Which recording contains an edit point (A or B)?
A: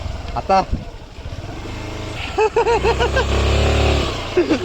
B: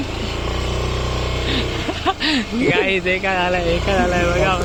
A